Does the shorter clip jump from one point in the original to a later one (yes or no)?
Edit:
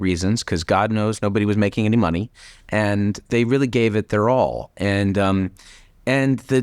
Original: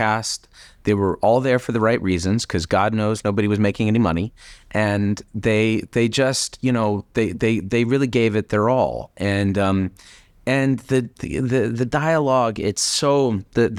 yes